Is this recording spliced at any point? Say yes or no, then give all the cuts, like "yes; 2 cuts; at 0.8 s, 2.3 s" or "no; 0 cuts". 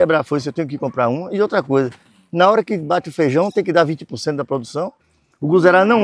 yes; 1 cut; at 5.0 s